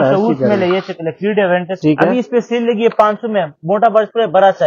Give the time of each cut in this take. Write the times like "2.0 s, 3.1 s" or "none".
1.7 s